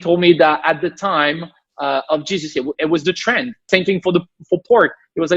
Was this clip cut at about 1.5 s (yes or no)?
no